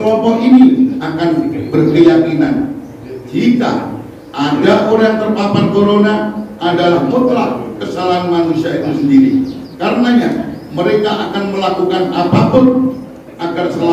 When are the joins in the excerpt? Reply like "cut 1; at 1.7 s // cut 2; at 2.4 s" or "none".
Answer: cut 1; at 1.0 s // cut 2; at 9.6 s